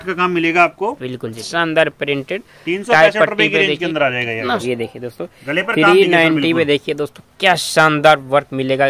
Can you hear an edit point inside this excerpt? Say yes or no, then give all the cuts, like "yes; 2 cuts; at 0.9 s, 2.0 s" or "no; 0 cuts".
yes; 2 cuts; at 1.4 s, 4.6 s